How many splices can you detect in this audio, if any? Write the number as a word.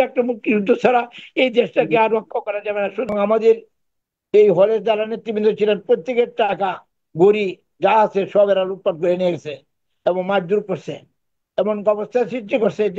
one